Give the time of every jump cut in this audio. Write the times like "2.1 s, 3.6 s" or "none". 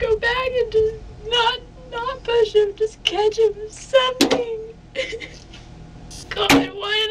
6.2 s